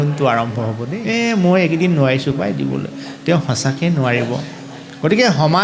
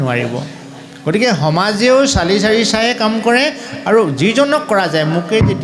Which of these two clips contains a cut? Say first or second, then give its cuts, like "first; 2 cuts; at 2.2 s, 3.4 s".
first; 1 cut; at 0.9 s